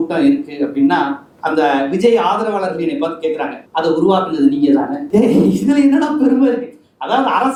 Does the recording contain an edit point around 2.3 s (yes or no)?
no